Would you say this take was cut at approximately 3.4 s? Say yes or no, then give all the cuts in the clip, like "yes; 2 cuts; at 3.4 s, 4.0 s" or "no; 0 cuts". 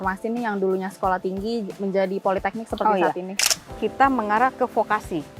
yes; 1 cut; at 3.4 s